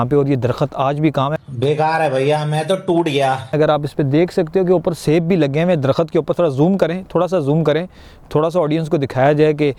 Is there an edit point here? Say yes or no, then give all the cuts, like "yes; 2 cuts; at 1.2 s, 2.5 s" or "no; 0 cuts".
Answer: no; 0 cuts